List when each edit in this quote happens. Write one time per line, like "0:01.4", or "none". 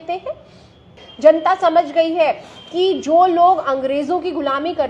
0:01.0